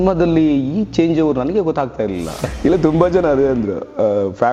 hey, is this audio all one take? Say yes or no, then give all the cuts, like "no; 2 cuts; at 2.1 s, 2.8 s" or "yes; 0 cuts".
no; 1 cut; at 2.4 s